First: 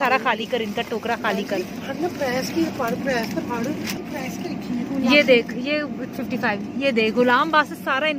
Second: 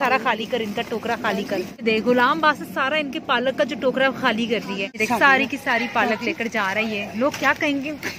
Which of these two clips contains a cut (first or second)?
second